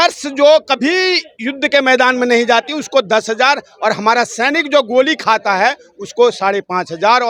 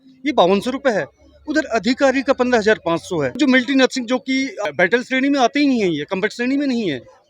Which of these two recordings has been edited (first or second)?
second